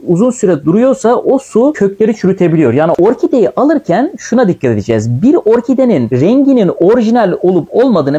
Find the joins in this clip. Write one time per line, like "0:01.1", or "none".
0:02.9